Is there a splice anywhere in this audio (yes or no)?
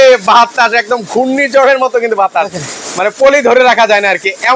no